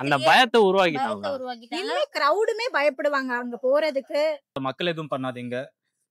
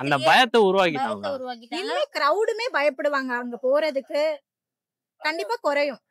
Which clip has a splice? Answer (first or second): first